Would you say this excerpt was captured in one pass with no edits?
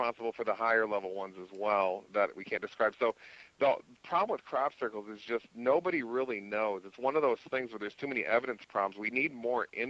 yes; 0 cuts

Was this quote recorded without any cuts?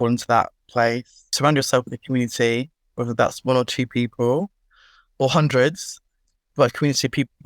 no; 1 cut; at 1.2 s

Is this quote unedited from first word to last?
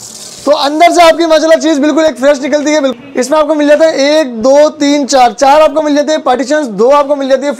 no; 1 cut; at 2.9 s

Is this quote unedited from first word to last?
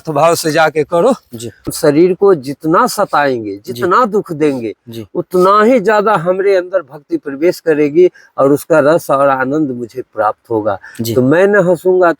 no; 1 cut; at 1.7 s

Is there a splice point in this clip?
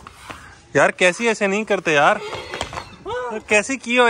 no; 0 cuts

